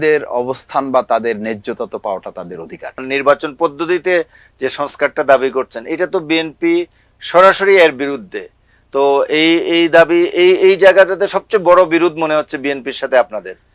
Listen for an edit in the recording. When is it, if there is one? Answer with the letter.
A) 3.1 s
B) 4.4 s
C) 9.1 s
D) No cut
A